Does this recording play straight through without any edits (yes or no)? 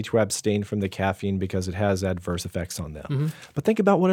yes